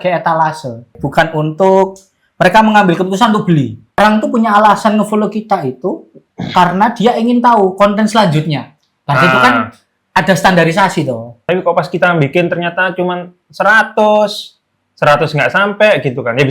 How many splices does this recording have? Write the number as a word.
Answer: three